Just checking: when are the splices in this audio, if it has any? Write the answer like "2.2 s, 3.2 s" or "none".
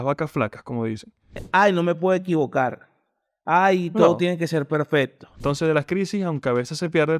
1.4 s, 5.3 s